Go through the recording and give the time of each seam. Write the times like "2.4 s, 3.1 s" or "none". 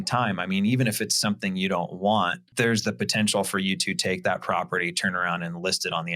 2.4 s